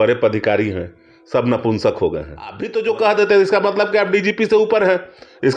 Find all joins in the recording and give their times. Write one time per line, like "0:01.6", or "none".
0:02.6

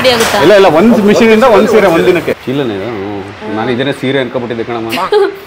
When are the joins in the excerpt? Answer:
0:02.3

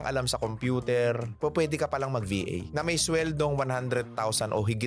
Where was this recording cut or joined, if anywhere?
none

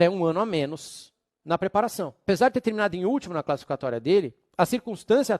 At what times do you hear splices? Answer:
0:02.1

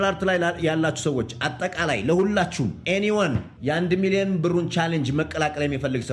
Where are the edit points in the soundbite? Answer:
none

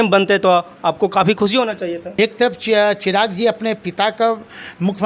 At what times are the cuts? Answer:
0:02.0

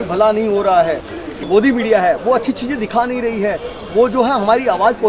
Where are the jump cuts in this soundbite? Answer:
0:01.5

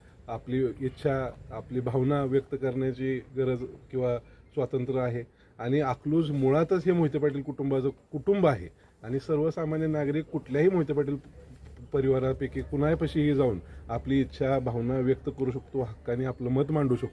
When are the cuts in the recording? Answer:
none

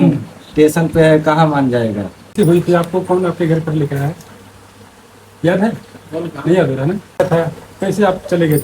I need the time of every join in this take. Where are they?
0:02.3
0:07.2

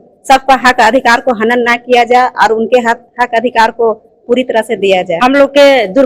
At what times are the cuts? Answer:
0:05.1

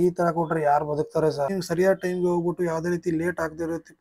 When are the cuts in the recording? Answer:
0:01.5

